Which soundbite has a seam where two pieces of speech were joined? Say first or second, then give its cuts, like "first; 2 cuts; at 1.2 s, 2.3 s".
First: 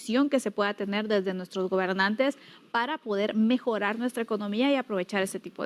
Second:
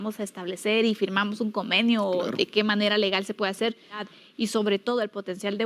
second; 1 cut; at 4.1 s